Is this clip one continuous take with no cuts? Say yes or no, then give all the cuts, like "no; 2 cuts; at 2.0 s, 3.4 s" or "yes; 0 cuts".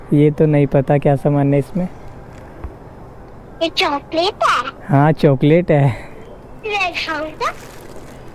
yes; 0 cuts